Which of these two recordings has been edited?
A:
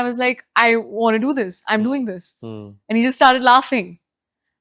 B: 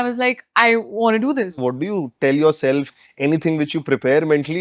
B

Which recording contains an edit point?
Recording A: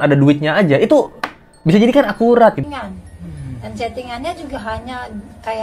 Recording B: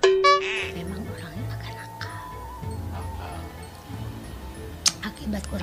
A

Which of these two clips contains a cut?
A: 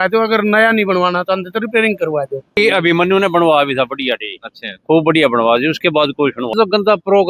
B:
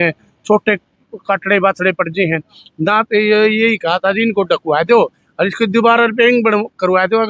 A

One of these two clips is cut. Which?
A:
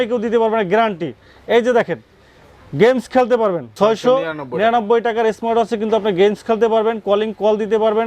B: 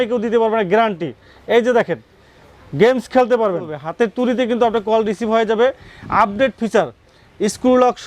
B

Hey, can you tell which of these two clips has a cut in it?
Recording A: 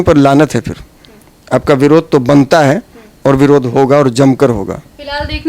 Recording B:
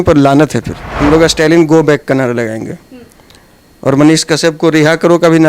B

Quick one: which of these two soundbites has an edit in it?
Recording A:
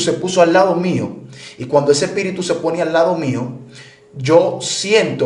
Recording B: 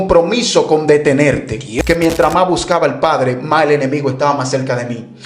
B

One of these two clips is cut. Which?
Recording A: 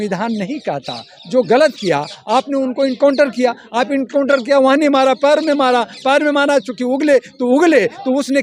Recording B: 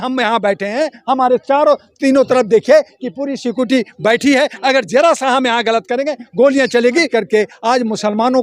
B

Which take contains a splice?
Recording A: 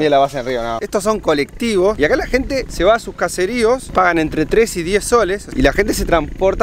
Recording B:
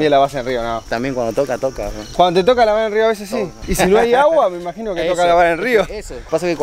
A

